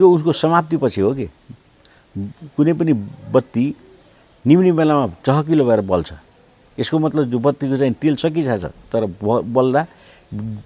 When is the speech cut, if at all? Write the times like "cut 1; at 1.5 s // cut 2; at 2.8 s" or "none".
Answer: none

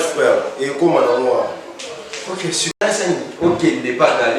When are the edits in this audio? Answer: cut 1; at 2.8 s

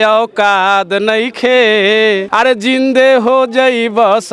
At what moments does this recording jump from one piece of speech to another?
cut 1; at 2.3 s

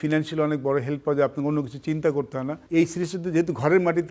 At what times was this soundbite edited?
cut 1; at 2.6 s

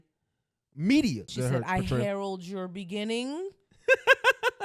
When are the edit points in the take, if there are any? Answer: cut 1; at 1.3 s

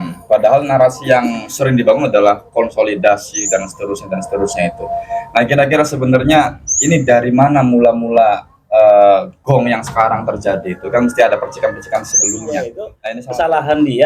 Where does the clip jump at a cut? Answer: cut 1; at 12.9 s

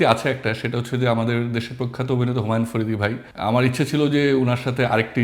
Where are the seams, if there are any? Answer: cut 1; at 3.3 s

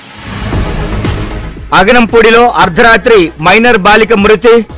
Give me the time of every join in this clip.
cut 1; at 1.3 s

